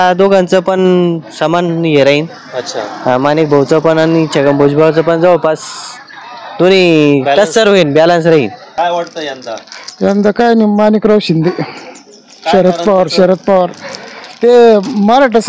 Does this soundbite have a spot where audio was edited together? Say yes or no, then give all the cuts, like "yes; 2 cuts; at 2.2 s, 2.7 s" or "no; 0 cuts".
yes; 1 cut; at 8.6 s